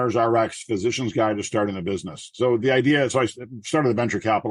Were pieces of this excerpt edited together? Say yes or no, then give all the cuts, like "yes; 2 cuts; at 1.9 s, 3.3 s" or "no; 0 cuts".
no; 0 cuts